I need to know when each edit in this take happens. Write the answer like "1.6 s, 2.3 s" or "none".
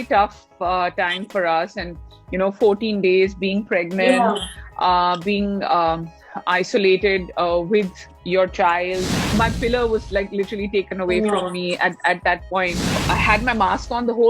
9.3 s, 12.8 s